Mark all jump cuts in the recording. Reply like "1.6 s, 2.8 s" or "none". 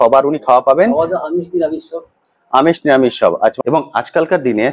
3.6 s